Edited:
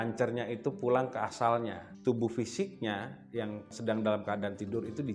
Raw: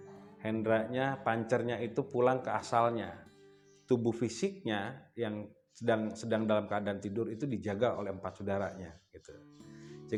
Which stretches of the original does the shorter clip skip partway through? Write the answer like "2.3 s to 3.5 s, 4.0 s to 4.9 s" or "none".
3.2 s to 3.7 s, 5.6 s to 6.2 s